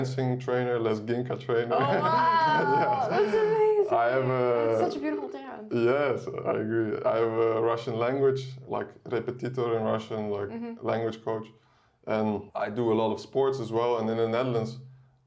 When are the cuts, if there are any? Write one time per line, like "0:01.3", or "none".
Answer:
0:08.5
0:12.5